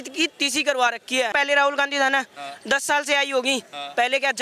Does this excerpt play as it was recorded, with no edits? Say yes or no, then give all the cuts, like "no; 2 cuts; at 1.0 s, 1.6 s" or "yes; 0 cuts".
no; 1 cut; at 1.3 s